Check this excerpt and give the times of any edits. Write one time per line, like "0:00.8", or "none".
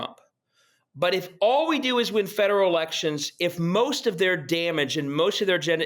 0:01.3

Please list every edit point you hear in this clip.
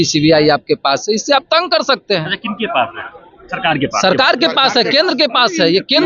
none

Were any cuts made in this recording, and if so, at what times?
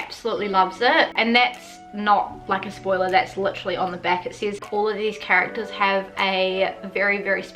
0:01.2
0:04.6

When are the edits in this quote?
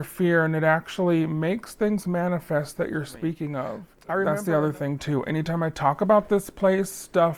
0:03.9

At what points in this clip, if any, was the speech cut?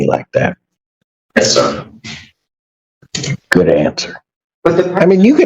0:04.5

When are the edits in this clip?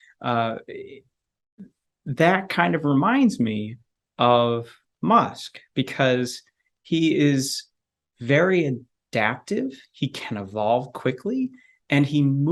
none

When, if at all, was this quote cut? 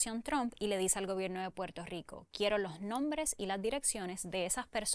none

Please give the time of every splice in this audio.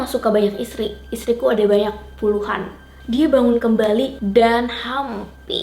0:03.0

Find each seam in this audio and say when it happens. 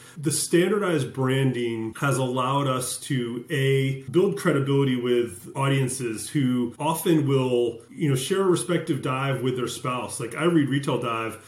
0:01.9
0:04.0
0:05.5
0:06.7
0:07.9

